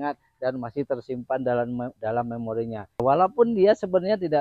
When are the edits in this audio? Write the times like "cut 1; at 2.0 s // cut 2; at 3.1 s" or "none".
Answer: cut 1; at 3.0 s